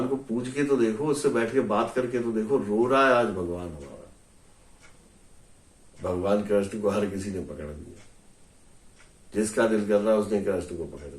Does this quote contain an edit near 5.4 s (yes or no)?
yes